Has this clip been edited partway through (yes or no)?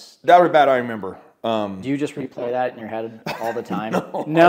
no